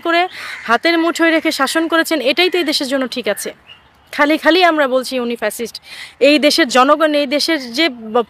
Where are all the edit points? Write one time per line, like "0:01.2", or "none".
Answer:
none